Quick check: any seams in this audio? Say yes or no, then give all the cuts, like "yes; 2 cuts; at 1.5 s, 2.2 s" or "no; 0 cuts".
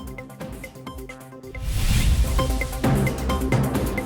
no; 0 cuts